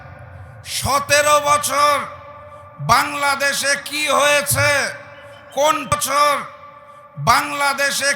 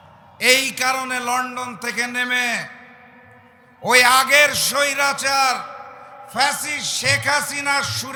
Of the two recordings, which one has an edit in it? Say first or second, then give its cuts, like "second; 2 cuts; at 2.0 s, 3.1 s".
first; 1 cut; at 5.9 s